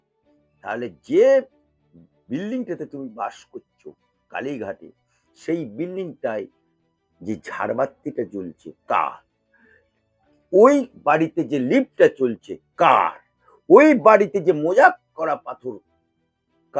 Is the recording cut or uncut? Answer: uncut